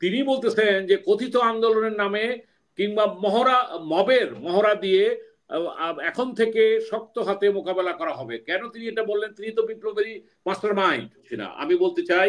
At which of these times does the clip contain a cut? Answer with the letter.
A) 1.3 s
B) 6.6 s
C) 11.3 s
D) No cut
C